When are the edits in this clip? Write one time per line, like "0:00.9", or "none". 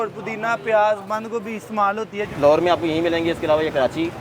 0:02.2